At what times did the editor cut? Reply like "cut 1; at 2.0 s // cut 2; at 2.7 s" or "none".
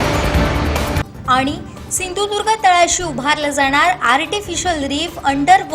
cut 1; at 1.0 s